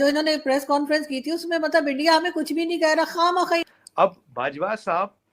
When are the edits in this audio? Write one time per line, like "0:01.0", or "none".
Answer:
0:03.7